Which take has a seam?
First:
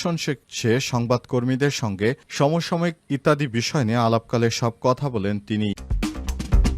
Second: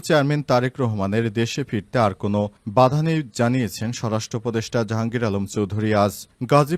first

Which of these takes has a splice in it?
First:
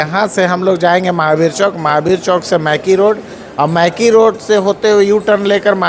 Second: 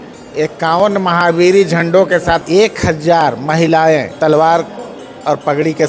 second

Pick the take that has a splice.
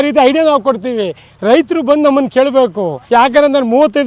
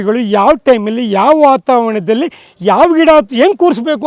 first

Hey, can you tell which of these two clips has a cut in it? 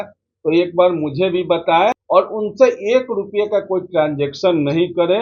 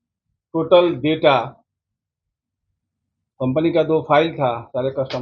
first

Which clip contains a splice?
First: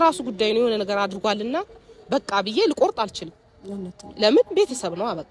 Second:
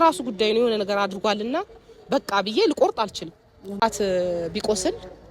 second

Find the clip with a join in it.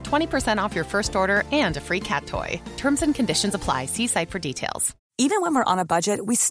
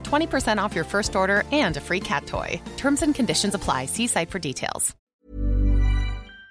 second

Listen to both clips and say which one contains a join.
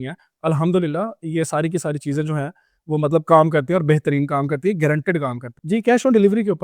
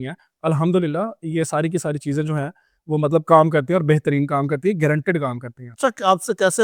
first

